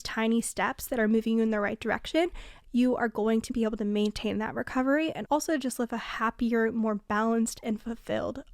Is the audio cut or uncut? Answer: cut